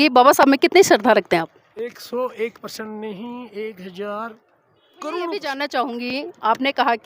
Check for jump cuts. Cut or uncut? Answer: cut